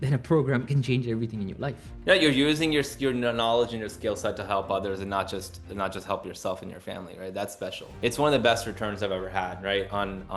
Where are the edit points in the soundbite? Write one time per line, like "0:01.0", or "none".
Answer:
0:01.9
0:07.9